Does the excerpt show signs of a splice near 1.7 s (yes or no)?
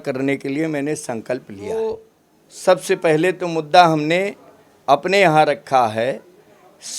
yes